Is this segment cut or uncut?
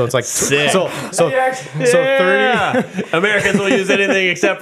uncut